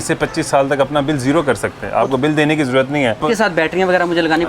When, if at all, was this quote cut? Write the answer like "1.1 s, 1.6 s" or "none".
3.2 s